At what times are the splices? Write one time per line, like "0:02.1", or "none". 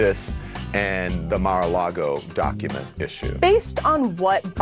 0:03.3